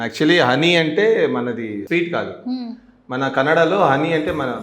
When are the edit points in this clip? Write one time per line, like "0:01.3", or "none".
0:01.8